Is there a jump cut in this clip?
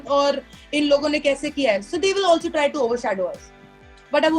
no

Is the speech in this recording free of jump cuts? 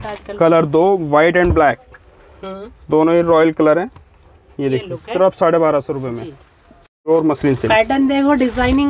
yes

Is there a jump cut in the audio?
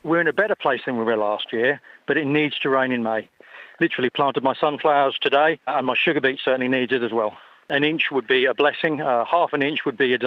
yes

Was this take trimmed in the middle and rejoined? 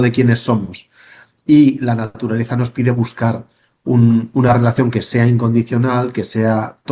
no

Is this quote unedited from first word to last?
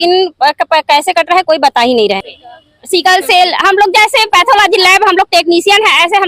no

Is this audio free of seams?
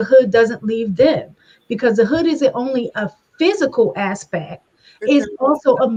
yes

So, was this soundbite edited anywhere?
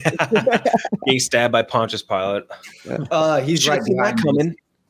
no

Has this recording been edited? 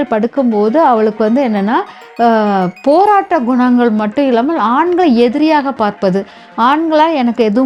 no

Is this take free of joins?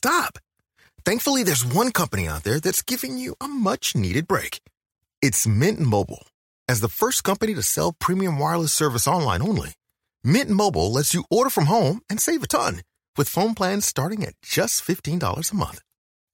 yes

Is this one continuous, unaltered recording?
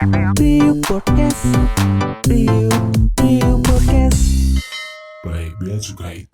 yes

